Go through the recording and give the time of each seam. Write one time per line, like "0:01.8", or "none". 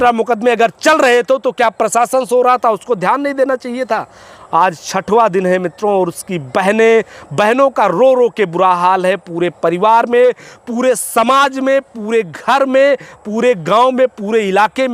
none